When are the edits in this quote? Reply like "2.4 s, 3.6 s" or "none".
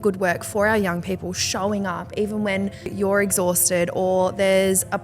2.9 s